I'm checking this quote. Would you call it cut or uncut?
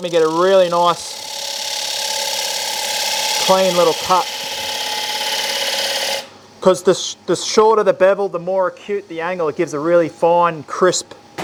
uncut